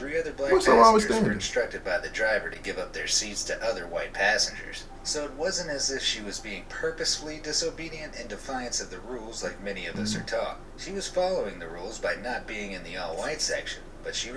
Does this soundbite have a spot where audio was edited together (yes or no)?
no